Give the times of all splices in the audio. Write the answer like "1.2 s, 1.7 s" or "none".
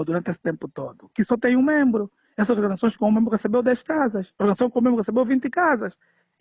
none